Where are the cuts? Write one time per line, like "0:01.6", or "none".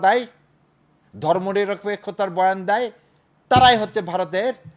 none